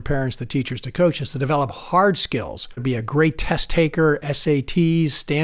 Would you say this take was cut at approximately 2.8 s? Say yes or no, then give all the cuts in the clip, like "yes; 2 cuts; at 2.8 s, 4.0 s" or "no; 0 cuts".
yes; 1 cut; at 2.8 s